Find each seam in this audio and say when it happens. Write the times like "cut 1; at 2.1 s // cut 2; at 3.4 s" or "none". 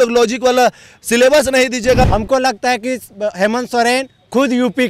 cut 1; at 2.1 s